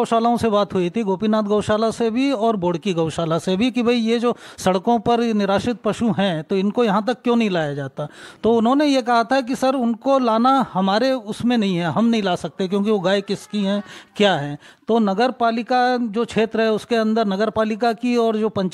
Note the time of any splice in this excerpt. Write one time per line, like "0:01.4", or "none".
none

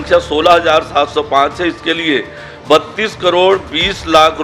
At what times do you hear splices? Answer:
none

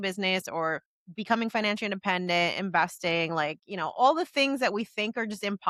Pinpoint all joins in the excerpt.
none

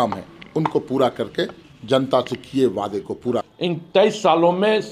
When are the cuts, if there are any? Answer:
0:03.5

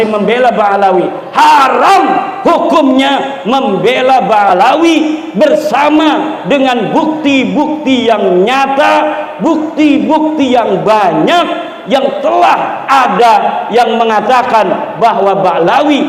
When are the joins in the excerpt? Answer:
none

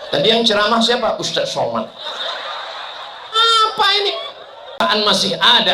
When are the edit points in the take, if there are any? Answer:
0:04.8

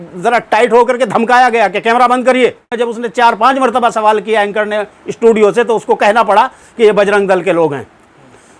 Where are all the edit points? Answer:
0:02.7

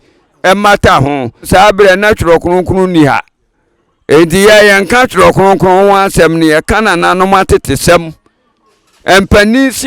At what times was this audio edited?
0:01.4

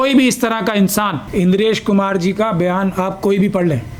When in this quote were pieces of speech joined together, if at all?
0:01.2

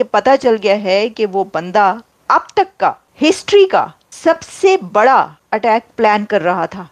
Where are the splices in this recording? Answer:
0:02.1
0:03.1
0:04.0
0:05.4

